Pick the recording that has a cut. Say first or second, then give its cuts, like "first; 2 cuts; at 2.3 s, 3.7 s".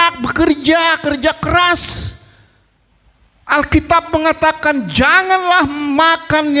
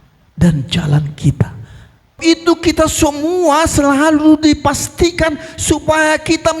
second; 1 cut; at 2.2 s